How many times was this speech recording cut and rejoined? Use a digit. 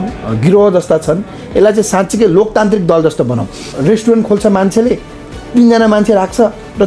1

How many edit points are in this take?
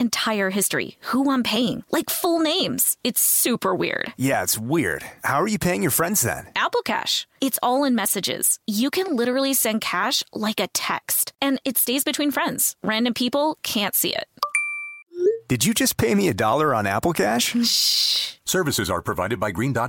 0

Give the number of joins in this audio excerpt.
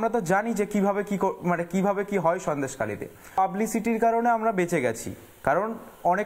1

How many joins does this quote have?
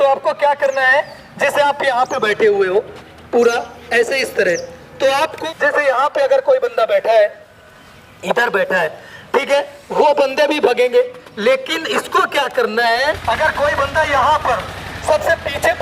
2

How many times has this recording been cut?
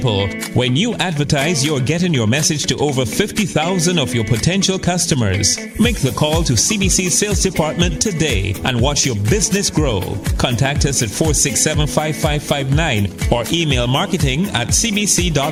0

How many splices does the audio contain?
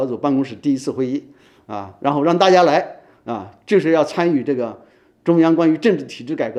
0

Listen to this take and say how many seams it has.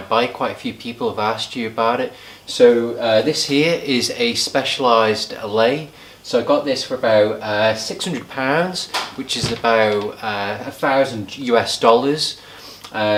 0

